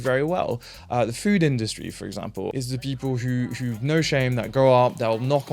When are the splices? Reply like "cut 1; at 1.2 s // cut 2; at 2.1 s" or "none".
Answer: cut 1; at 2.5 s